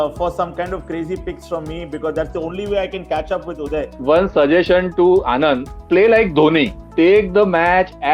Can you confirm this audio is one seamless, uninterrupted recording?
no; 3 cuts; at 3.9 s, 5.7 s, 6.8 s

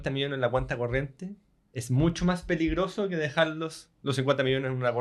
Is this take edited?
no; 0 cuts

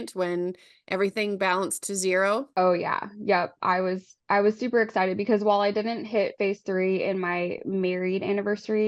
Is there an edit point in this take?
no; 0 cuts

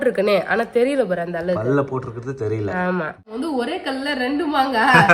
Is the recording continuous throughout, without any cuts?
no; 1 cut; at 3.3 s

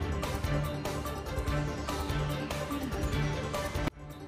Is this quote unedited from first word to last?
no; 1 cut; at 1.1 s

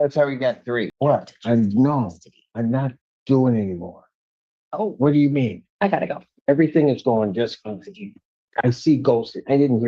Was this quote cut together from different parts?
yes; 2 cuts; at 0.9 s, 5.6 s

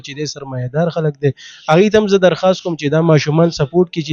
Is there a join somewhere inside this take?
no; 0 cuts

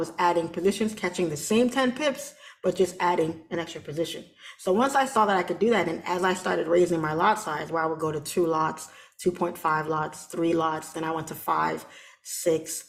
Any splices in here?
no; 0 cuts

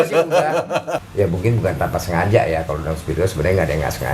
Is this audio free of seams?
no; 1 cut; at 1.0 s

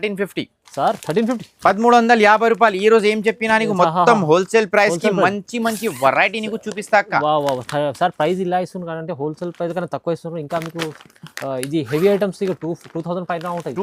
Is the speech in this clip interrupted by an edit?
no; 0 cuts

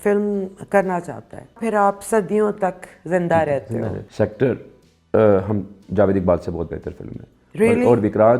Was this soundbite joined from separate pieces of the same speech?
yes; 2 cuts; at 1.6 s, 4.0 s

